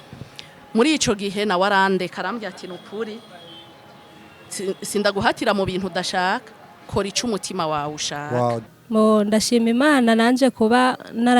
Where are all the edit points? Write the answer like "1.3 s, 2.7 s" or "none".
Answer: 8.6 s